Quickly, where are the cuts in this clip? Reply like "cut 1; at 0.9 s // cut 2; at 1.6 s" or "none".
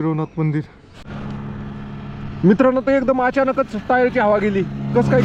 cut 1; at 1.2 s